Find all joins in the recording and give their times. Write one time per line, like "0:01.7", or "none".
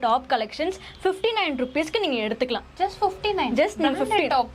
none